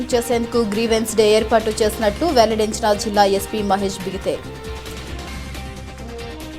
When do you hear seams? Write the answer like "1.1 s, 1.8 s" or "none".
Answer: none

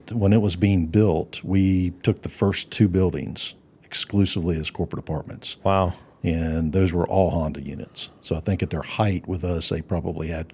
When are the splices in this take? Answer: none

